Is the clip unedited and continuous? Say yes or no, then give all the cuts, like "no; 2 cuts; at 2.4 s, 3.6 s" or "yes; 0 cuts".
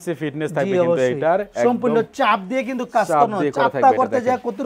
yes; 0 cuts